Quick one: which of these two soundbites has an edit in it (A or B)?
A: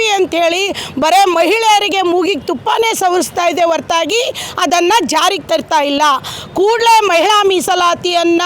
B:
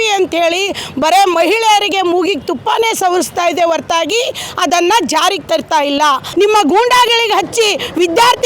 B